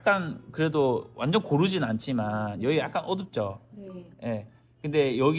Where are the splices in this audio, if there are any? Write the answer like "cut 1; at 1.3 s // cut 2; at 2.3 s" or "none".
none